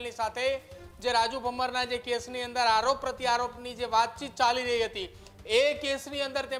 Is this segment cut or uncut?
uncut